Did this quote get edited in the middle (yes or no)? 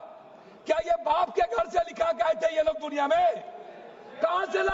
no